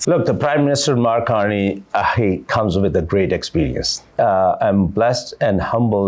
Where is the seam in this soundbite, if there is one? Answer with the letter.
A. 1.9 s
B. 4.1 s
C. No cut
B